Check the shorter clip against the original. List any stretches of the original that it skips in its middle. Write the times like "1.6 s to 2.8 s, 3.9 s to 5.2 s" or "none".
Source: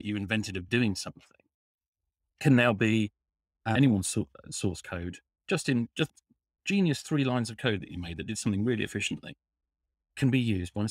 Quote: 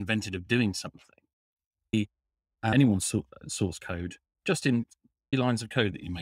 2.2 s to 3.0 s, 6.4 s to 7.2 s